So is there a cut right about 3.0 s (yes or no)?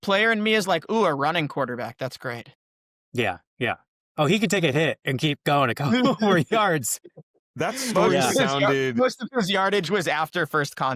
no